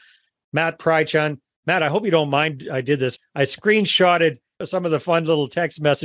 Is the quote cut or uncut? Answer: cut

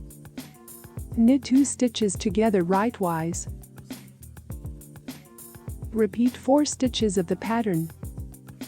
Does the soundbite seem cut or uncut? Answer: cut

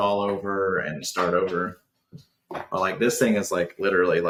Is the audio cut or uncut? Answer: uncut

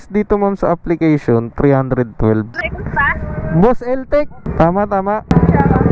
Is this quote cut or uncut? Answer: cut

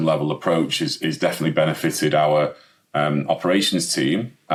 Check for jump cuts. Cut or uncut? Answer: uncut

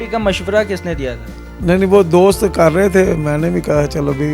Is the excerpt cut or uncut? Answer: uncut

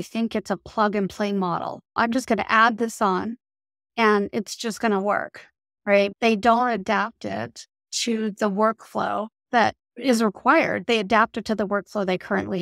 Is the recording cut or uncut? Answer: cut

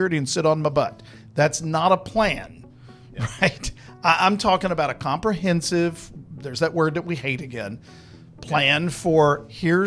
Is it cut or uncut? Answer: uncut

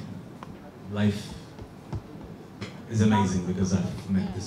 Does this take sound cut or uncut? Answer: uncut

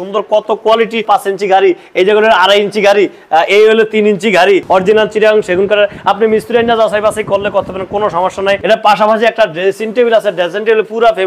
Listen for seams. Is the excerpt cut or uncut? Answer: cut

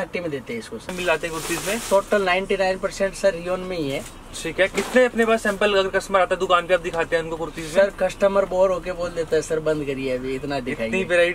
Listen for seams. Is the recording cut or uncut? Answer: cut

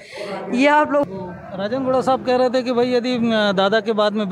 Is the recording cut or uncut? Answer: cut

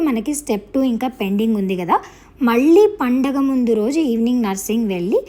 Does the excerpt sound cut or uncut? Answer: uncut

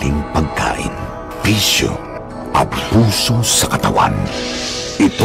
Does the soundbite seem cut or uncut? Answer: uncut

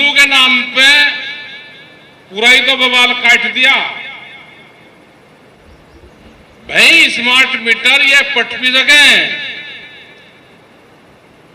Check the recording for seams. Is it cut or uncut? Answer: cut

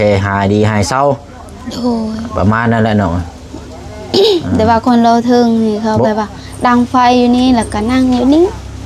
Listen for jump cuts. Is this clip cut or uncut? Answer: uncut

